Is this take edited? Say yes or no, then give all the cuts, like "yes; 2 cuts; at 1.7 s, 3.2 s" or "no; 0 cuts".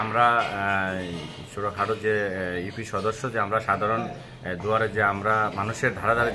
no; 0 cuts